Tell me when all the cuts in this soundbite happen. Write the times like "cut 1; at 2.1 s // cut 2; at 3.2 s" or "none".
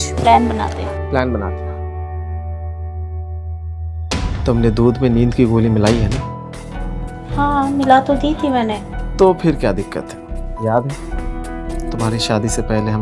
cut 1; at 4.1 s